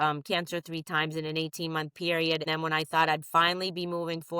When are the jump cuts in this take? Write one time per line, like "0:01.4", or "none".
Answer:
0:02.4